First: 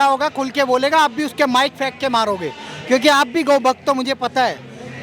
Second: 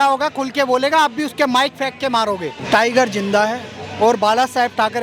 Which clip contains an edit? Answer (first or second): second